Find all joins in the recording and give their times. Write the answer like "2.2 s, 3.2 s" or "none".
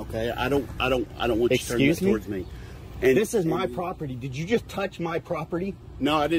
none